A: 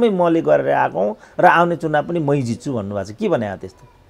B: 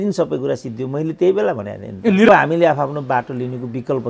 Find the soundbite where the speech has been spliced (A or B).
B